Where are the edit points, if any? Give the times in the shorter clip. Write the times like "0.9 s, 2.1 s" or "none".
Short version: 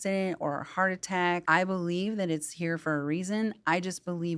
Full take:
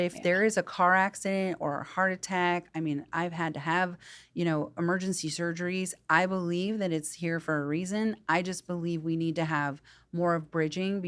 1.4 s